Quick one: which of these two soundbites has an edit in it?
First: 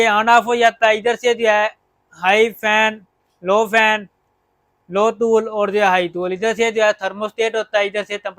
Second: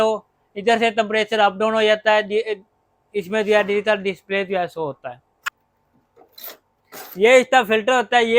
second; 1 cut; at 5.2 s

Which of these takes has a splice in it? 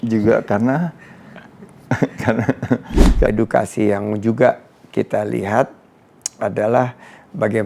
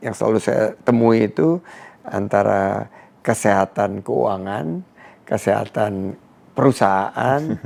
first; 1 cut; at 3.3 s

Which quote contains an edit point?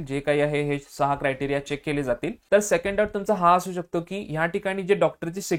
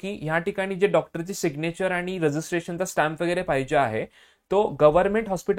first; 1 cut; at 2.3 s

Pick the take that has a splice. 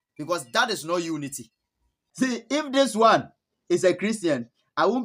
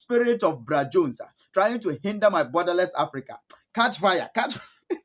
first; 1 cut; at 1.7 s

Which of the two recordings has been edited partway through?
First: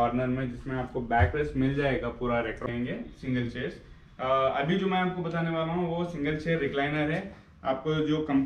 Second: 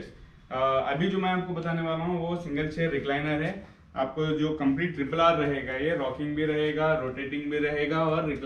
first; 1 cut; at 2.7 s

